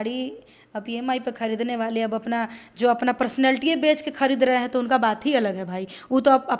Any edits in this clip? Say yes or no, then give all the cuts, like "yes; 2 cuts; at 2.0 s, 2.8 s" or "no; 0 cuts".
no; 0 cuts